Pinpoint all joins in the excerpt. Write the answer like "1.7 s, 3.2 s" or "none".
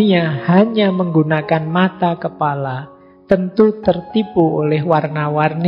none